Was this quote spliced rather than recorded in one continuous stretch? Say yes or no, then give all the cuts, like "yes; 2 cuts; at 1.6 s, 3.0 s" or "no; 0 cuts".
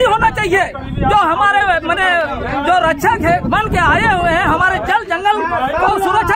no; 0 cuts